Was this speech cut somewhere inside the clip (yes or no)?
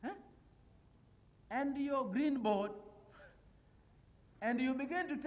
no